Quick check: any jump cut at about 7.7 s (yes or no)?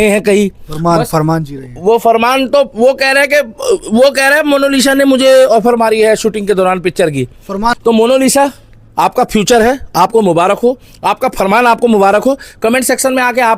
yes